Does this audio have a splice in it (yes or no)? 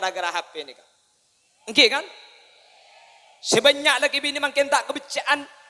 no